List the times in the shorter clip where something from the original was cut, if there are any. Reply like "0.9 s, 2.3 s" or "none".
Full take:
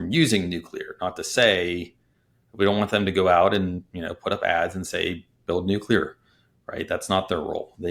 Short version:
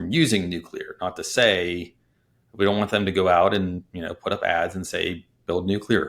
none